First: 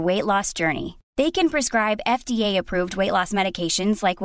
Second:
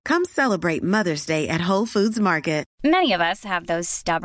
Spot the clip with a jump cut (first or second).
second